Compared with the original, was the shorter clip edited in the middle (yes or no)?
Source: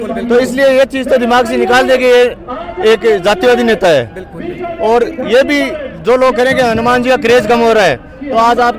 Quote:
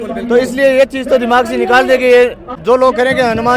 yes